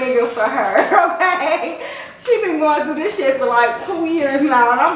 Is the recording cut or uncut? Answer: uncut